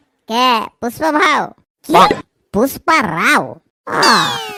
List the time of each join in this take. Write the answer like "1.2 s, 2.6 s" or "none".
none